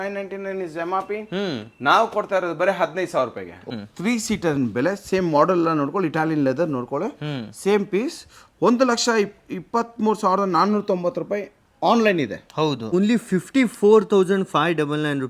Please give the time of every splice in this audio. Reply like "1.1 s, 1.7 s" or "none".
3.6 s, 12.9 s